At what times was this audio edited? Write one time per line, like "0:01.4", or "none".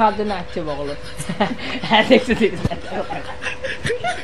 none